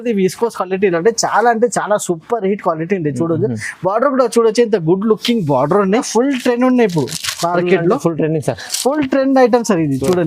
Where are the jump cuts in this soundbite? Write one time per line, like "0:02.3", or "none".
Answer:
0:06.1